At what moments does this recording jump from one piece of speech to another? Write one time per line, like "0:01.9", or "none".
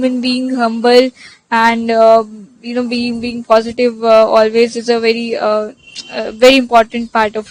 none